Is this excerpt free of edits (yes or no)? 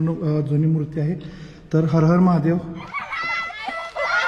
no